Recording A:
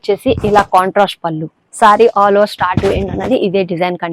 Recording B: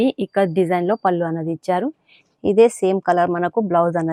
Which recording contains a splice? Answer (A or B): A